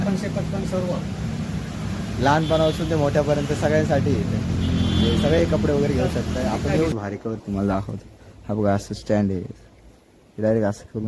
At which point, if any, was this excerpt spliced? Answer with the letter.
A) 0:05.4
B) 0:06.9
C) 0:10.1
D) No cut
B